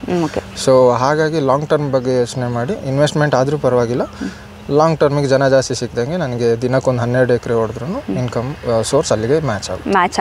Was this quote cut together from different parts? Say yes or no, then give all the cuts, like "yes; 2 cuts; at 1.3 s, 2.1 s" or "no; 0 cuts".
no; 0 cuts